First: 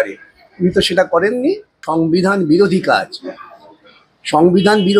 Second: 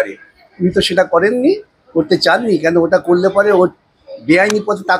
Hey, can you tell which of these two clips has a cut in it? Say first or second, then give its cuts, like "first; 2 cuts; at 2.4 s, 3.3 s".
first; 1 cut; at 1.7 s